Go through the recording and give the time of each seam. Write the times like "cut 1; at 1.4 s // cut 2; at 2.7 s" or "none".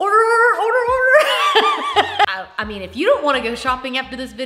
cut 1; at 2.3 s